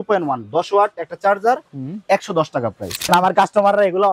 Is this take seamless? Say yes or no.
no